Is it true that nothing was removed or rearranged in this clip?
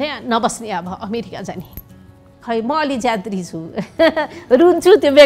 no; 1 cut; at 2.3 s

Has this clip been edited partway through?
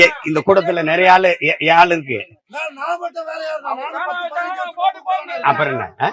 no; 0 cuts

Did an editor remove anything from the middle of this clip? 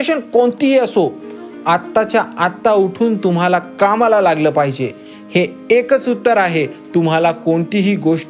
no; 0 cuts

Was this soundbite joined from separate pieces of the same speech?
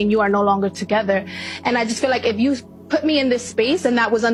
no; 0 cuts

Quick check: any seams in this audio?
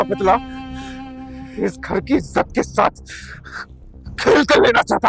no; 0 cuts

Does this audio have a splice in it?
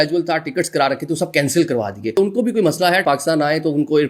yes; 2 cuts; at 2.1 s, 3.0 s

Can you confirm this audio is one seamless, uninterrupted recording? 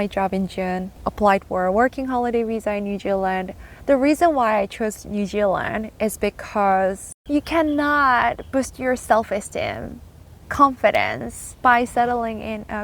no; 2 cuts; at 1.0 s, 7.2 s

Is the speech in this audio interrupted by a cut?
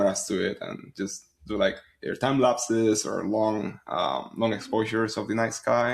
no; 0 cuts

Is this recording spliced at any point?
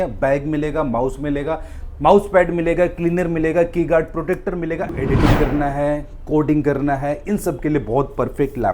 yes; 1 cut; at 4.9 s

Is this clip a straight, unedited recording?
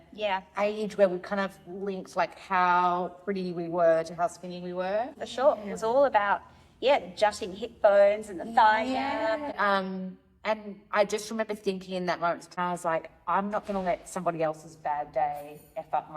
no; 3 cuts; at 5.2 s, 9.6 s, 12.6 s

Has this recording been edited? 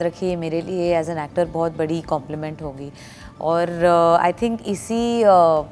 no; 0 cuts

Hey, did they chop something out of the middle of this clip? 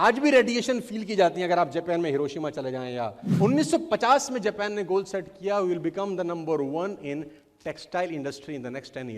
yes; 1 cut; at 3.2 s

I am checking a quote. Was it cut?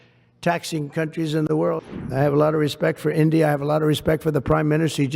yes; 1 cut; at 1.8 s

